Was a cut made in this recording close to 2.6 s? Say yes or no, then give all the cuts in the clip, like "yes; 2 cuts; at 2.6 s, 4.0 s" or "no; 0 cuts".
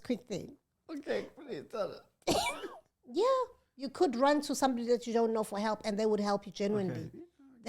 yes; 1 cut; at 2.6 s